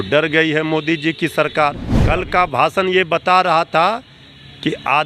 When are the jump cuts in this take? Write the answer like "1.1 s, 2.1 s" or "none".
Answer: 1.9 s